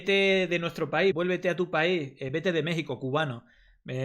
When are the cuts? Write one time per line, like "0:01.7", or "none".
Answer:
0:01.1